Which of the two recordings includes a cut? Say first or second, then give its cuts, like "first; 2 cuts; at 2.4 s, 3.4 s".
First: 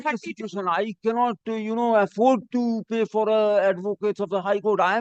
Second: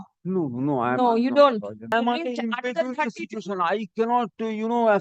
second; 1 cut; at 1.9 s